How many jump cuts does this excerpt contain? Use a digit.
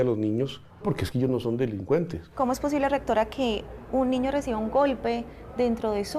2